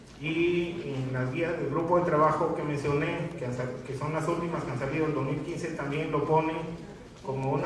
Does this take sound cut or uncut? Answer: uncut